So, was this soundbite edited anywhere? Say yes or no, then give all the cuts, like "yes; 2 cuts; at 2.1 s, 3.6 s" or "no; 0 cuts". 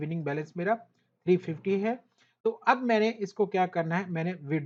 no; 0 cuts